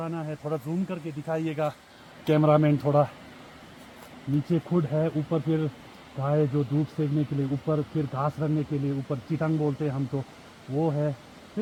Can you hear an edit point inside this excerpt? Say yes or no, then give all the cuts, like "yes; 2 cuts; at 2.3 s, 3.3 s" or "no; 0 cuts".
no; 0 cuts